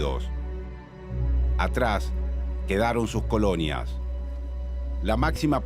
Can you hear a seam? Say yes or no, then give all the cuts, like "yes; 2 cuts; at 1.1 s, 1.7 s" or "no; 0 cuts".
yes; 1 cut; at 4.6 s